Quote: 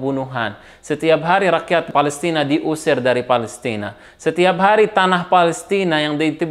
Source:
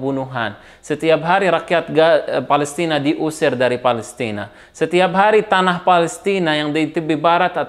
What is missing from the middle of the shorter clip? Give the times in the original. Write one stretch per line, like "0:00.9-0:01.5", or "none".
0:01.9-0:02.4